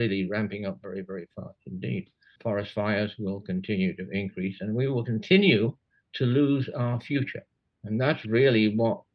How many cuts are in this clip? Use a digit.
0